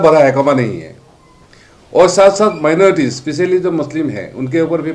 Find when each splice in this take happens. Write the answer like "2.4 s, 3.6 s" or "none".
none